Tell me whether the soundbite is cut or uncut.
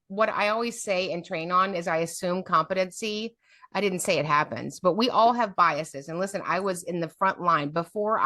uncut